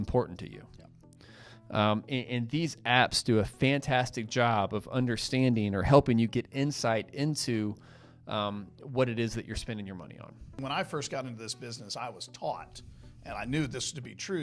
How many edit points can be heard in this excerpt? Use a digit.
1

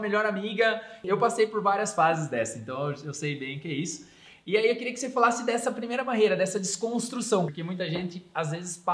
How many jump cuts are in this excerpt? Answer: 2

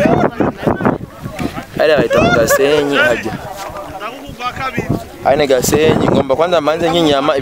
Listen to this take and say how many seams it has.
0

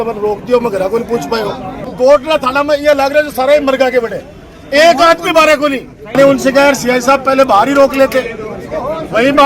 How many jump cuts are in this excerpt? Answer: 2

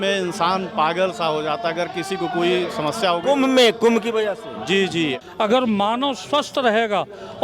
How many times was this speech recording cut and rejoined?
1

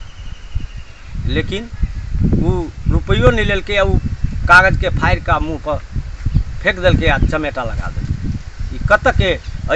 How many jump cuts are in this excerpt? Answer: 0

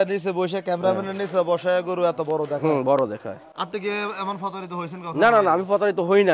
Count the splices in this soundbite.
0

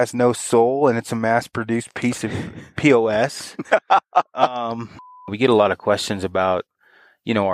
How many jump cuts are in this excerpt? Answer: 1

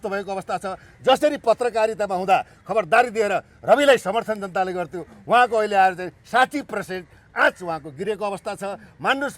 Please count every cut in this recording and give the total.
0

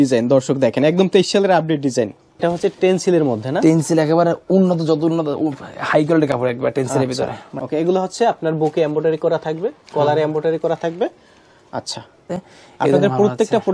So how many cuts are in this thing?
3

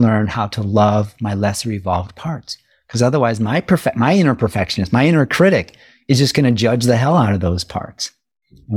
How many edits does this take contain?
0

